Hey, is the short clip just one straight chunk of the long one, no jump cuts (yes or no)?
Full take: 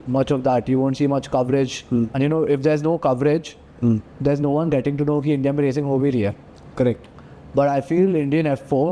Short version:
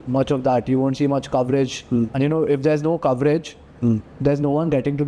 yes